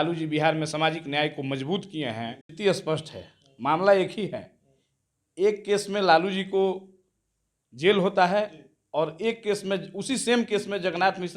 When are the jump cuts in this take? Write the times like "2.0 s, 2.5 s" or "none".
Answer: 2.5 s